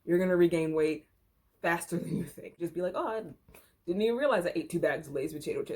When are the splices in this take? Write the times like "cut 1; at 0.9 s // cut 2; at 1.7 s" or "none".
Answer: cut 1; at 2.6 s